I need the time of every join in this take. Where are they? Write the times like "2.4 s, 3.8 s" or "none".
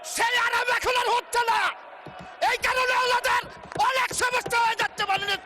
none